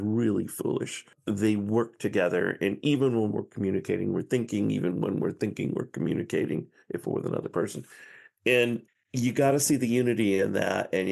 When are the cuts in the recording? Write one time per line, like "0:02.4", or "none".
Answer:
0:01.1